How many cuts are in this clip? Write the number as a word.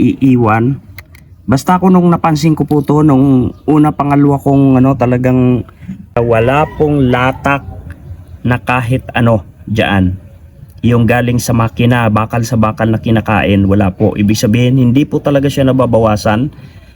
one